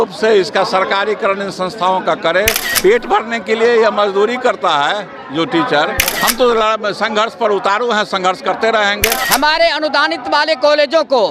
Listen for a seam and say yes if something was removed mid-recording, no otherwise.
yes